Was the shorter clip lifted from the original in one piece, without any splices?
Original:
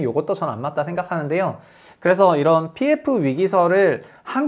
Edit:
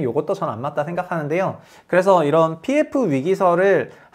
no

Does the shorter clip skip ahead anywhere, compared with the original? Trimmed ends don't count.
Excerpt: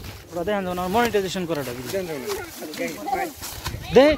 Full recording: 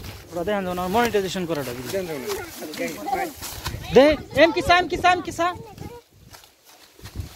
no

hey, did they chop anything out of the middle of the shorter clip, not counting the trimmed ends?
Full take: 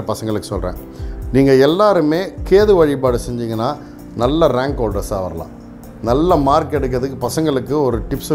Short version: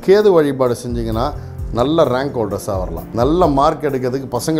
yes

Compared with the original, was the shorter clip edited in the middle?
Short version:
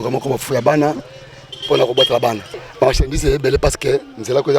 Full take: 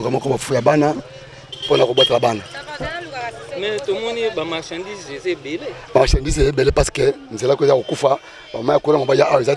yes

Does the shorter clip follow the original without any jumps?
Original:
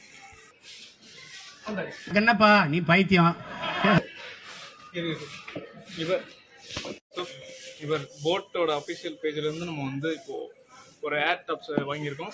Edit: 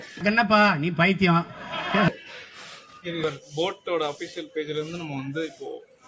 no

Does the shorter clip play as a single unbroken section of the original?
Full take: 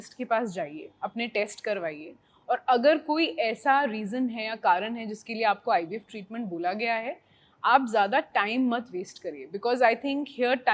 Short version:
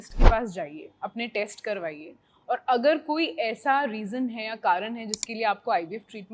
yes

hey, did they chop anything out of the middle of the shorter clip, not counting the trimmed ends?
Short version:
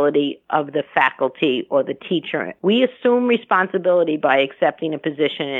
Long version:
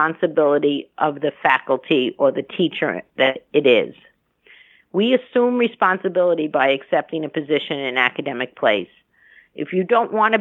yes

